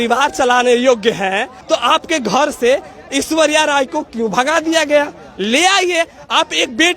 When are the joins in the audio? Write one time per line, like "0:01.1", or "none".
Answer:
0:01.5

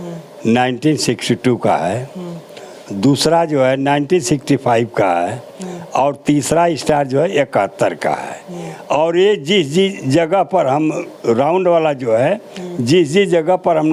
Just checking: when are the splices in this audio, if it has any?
none

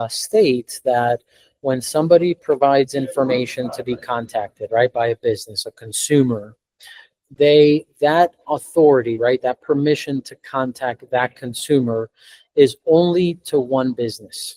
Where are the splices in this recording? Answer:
none

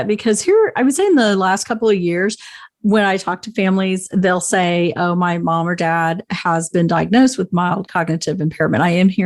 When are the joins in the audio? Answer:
none

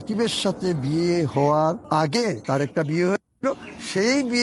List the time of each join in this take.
0:02.2

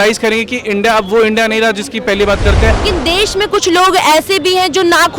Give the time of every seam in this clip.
0:02.8

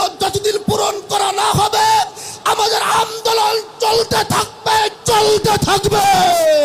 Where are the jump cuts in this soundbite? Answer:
none

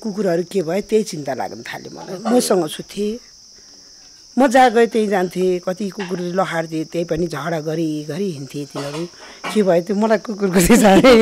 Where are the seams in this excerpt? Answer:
none

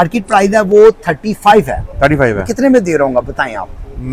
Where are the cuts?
none

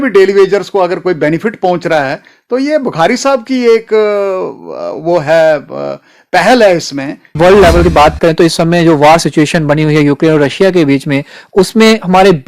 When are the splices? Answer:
0:07.3

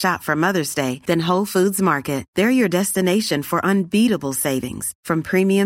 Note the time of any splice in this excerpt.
none

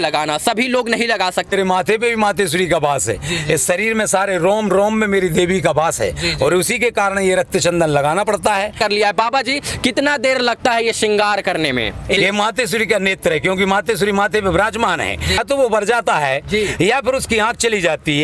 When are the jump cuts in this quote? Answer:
0:01.5
0:08.8
0:12.2
0:15.4

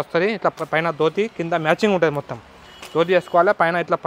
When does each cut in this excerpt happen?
none

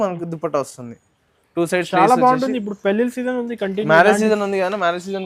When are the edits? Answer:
none

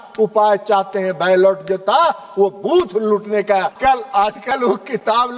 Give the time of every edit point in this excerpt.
0:03.7

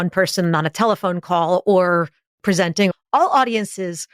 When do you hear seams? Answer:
0:02.5

